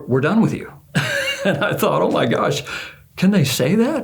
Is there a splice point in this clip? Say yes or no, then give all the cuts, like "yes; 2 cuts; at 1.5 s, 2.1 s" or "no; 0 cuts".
no; 0 cuts